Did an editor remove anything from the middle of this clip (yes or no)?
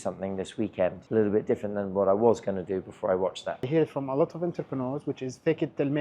yes